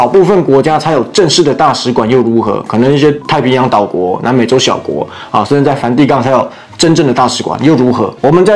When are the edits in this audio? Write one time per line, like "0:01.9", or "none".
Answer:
none